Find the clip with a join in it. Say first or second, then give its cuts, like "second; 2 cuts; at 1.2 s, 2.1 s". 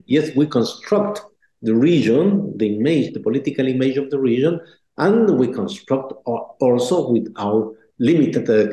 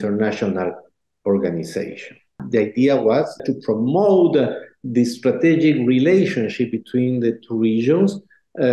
second; 2 cuts; at 2.4 s, 3.4 s